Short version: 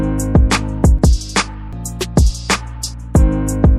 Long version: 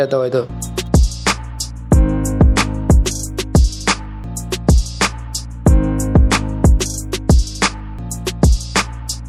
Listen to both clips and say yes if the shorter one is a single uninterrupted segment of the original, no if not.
no